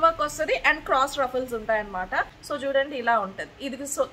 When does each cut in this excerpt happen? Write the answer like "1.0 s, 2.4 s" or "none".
2.4 s